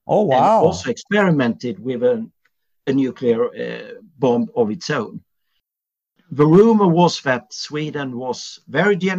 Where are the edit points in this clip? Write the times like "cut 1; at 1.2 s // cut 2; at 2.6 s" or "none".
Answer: cut 1; at 5.9 s